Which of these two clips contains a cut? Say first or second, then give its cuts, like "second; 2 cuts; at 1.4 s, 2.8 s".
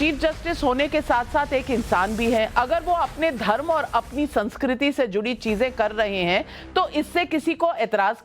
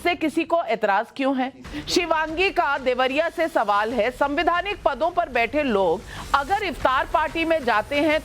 second; 1 cut; at 7.2 s